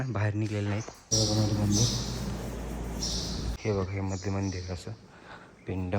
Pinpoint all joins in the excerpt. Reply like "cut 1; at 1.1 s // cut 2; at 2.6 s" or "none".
cut 1; at 1.0 s // cut 2; at 3.6 s